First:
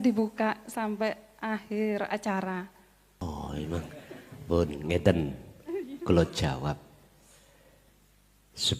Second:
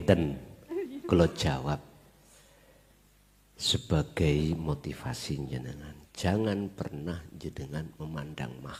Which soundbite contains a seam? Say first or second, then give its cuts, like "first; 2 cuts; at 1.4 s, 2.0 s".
first; 1 cut; at 3.2 s